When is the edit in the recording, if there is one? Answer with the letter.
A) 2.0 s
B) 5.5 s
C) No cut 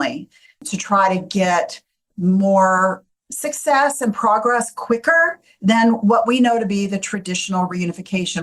C